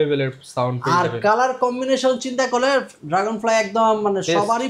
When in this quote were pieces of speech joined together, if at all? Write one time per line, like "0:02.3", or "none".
none